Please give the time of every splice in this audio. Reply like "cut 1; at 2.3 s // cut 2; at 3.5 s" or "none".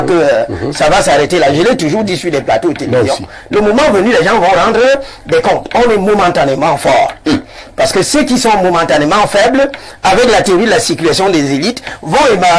none